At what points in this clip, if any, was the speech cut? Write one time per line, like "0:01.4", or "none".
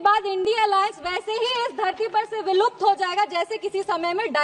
none